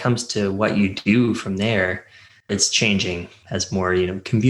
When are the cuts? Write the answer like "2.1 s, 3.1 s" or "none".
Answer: 3.3 s